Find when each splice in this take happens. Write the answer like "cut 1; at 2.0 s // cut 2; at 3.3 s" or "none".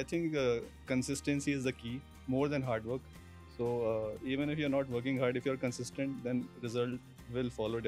none